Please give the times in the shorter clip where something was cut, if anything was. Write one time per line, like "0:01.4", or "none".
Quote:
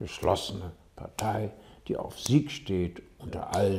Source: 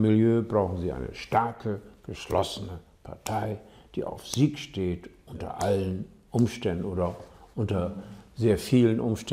none